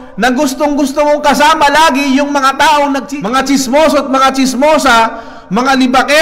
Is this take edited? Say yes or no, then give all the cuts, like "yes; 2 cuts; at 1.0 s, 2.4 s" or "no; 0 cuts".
yes; 1 cut; at 3.1 s